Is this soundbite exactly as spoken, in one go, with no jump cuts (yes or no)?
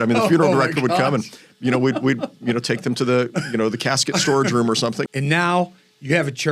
no